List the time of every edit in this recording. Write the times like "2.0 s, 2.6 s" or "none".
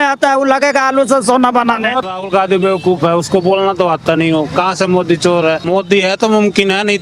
2.1 s, 5.7 s